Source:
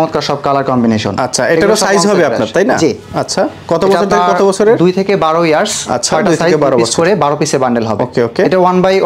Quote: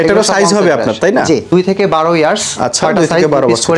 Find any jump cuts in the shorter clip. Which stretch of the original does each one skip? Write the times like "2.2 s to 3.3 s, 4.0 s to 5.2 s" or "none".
3.0 s to 4.8 s

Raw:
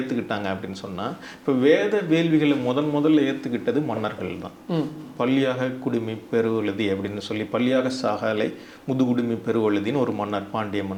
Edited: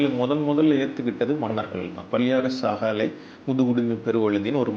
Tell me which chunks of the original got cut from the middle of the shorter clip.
4.5 s to 7.5 s

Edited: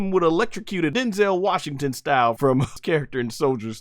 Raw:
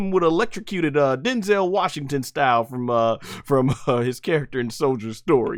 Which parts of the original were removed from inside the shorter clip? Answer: 0.9 s to 1.2 s, 2.9 s to 4.0 s

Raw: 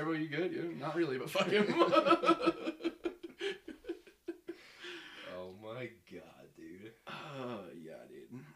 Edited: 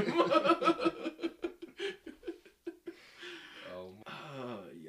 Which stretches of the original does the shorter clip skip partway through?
5.6 s to 7.0 s

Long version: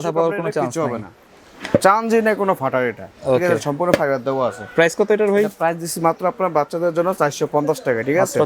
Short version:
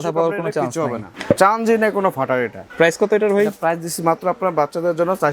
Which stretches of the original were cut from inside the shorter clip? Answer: 1.1 s to 1.5 s, 3.1 s to 4.6 s

